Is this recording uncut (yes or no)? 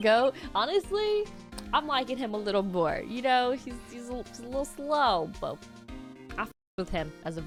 yes